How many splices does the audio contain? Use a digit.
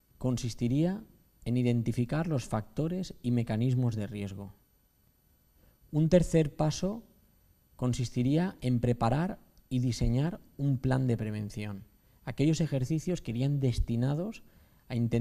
0